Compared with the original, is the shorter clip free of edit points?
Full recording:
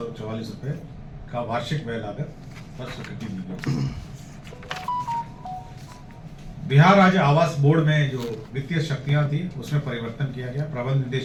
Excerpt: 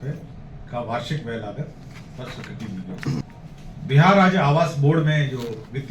no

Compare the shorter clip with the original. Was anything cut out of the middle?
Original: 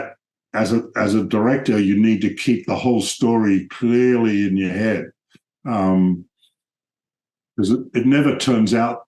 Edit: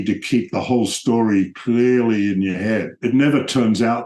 yes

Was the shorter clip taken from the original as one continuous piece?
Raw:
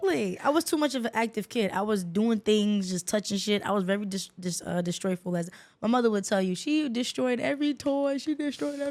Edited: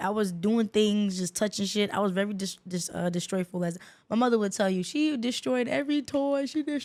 yes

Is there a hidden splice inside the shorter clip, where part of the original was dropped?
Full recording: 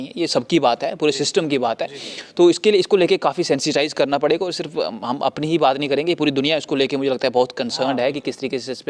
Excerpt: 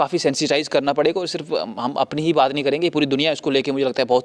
no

